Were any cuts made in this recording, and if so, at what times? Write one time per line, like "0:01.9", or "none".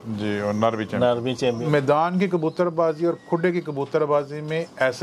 0:01.6